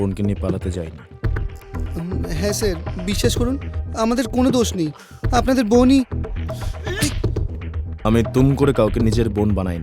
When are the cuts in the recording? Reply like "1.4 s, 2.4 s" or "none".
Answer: 7.8 s